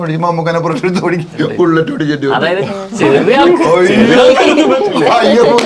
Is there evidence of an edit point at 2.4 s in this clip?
no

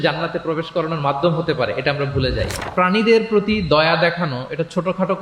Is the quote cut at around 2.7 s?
yes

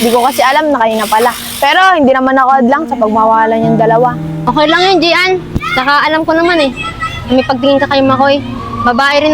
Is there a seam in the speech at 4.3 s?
yes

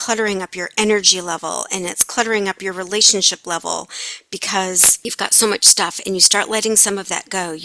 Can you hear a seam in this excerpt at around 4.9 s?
yes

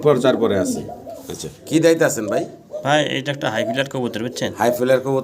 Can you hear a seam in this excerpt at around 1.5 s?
yes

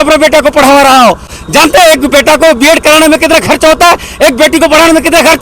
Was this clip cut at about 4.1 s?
no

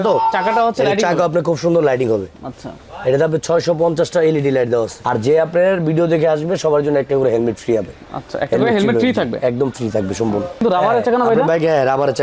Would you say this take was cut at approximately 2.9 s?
no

